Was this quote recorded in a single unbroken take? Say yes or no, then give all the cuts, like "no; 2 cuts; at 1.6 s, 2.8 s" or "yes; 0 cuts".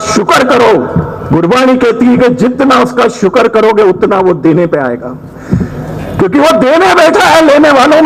yes; 0 cuts